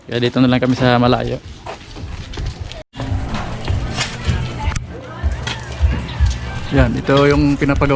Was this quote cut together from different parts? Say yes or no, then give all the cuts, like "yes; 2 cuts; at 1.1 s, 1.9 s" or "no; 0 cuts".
yes; 1 cut; at 2.9 s